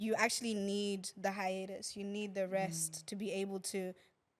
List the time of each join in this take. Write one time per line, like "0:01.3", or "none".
none